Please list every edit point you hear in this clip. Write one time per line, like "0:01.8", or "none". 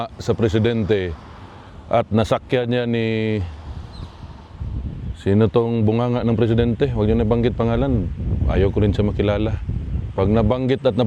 none